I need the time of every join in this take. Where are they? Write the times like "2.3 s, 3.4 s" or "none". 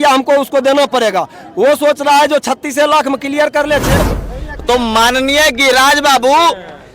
4.0 s